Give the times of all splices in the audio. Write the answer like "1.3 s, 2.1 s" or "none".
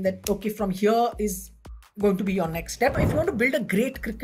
2.9 s